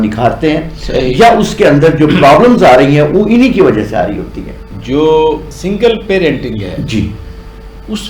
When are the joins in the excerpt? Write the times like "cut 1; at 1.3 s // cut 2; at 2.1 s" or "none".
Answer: cut 1; at 4.7 s